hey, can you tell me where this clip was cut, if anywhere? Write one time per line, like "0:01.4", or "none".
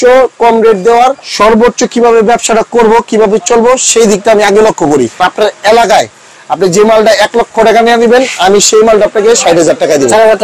0:01.2
0:05.2